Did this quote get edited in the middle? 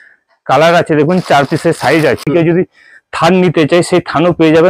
yes; 1 cut; at 2.2 s

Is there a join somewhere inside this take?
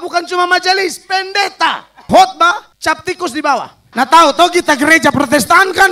yes; 3 cuts; at 2.0 s, 2.7 s, 3.8 s

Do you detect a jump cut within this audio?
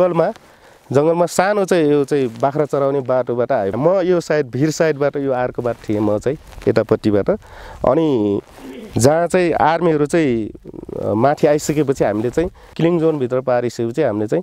yes; 2 cuts; at 3.7 s, 12.7 s

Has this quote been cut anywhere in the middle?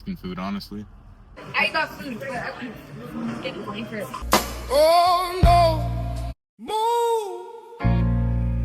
yes; 1 cut; at 4.2 s

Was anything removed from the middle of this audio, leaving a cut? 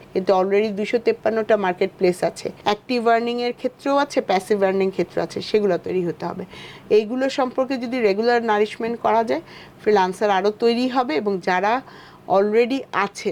no; 0 cuts

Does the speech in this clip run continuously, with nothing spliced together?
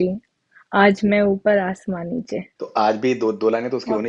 no; 1 cut; at 2.5 s

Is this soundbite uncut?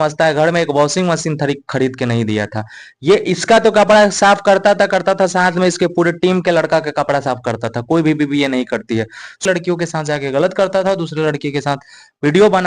no; 1 cut; at 9.4 s

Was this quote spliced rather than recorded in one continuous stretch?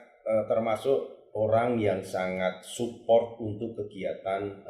no; 0 cuts

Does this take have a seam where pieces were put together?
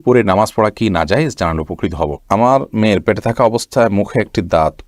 yes; 1 cut; at 2.2 s

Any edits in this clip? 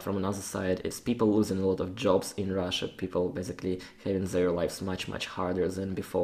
no; 0 cuts

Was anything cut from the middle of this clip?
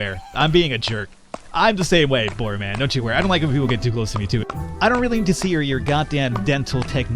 yes; 1 cut; at 4.4 s

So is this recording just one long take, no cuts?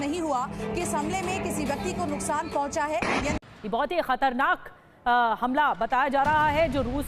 no; 1 cut; at 3.4 s

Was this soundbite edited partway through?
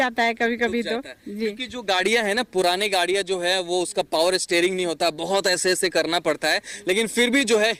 no; 0 cuts

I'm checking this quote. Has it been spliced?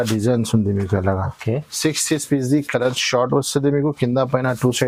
no; 0 cuts

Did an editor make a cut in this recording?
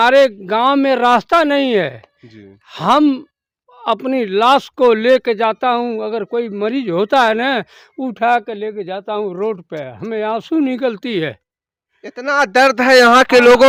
no; 0 cuts

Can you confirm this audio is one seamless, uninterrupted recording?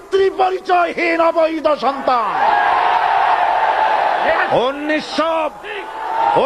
yes; 0 cuts

